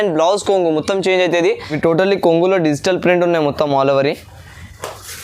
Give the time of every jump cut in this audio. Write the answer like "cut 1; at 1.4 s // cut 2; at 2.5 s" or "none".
cut 1; at 1.7 s